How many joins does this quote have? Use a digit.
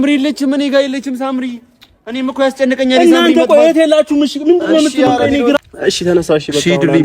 1